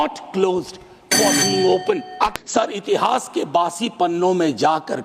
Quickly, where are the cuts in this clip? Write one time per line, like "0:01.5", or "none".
0:02.4